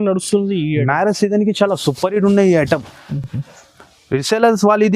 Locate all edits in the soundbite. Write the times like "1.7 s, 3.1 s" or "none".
none